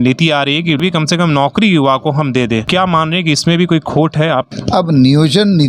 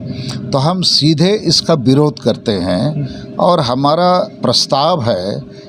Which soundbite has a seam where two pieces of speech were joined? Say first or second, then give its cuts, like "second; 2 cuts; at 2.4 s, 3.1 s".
first; 3 cuts; at 0.8 s, 2.7 s, 4.5 s